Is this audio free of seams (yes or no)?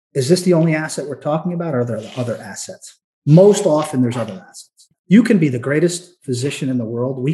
no